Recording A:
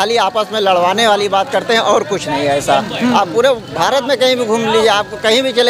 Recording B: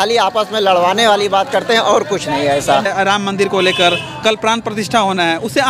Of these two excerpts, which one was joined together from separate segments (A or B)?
B